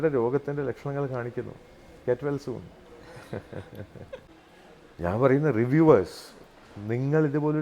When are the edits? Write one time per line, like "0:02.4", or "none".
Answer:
0:04.3